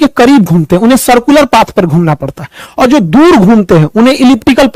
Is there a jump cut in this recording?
no; 0 cuts

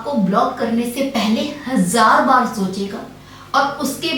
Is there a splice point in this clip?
no; 0 cuts

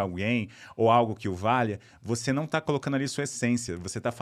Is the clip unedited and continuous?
yes; 0 cuts

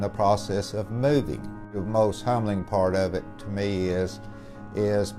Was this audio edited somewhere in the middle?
no; 0 cuts

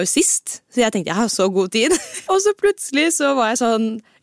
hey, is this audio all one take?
no; 1 cut; at 2.1 s

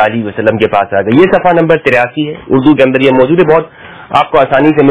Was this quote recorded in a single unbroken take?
yes; 0 cuts

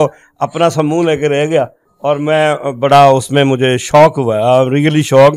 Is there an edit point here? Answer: no; 0 cuts

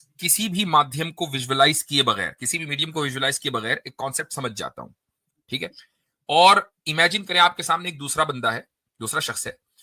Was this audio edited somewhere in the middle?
no; 0 cuts

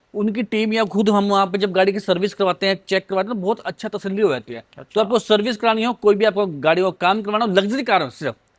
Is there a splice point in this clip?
no; 0 cuts

